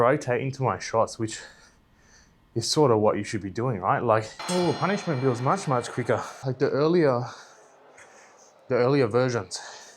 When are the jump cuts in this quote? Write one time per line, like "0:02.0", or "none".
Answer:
0:04.4
0:06.4